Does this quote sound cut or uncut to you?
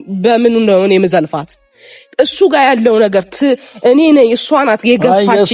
uncut